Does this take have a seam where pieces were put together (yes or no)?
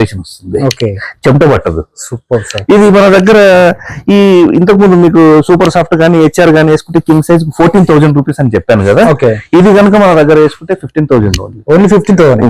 no